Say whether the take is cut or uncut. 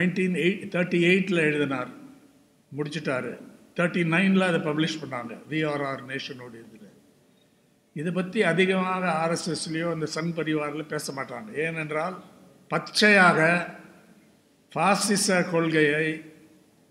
uncut